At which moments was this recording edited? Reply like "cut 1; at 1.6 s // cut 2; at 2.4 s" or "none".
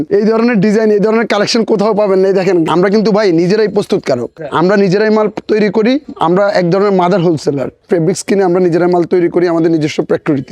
cut 1; at 2.7 s // cut 2; at 4.4 s // cut 3; at 6.1 s // cut 4; at 7.8 s